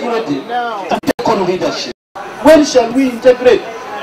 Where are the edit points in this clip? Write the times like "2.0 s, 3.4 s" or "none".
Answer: 2.2 s